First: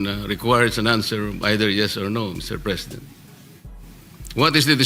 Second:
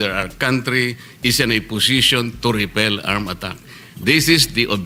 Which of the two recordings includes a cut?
first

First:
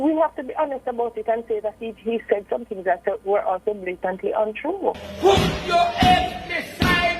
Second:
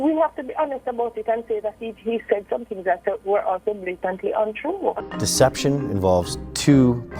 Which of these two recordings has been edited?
first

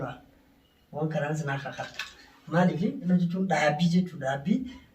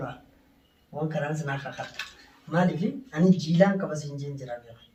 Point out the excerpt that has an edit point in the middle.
first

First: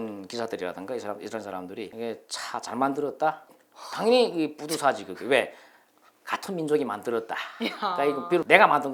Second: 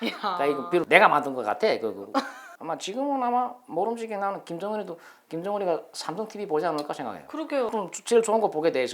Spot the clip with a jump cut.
second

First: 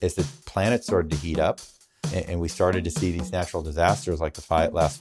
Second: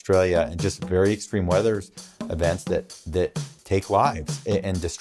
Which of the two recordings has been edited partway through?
first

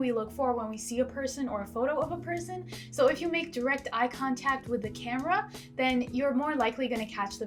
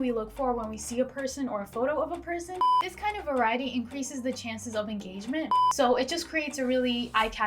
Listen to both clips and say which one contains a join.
second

